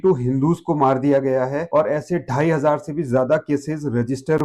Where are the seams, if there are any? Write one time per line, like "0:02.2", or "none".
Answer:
0:01.6